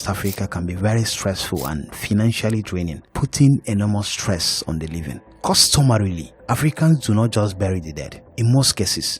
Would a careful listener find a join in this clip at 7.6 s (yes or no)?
no